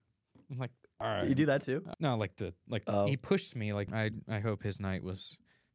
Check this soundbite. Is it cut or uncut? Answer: cut